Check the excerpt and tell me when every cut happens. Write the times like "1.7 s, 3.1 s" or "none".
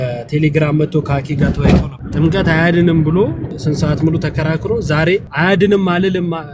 2.0 s, 3.5 s, 5.3 s